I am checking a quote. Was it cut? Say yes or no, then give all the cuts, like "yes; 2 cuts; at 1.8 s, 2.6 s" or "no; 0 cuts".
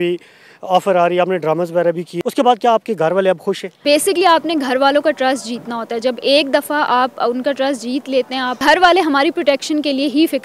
yes; 3 cuts; at 2.1 s, 3.7 s, 8.5 s